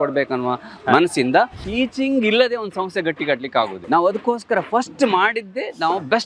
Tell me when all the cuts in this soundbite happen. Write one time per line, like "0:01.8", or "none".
0:01.6
0:03.9

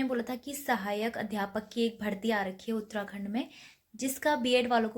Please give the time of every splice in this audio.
none

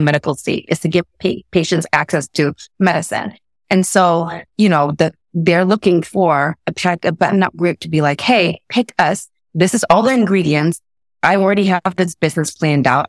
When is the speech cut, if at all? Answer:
none

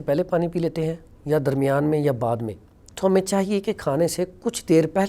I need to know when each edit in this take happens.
none

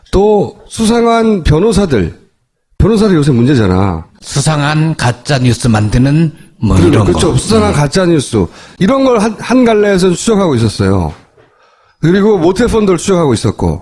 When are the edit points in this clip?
0:05.6

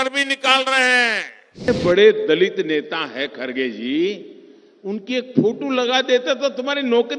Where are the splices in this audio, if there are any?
0:01.7

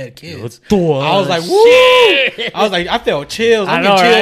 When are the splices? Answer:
none

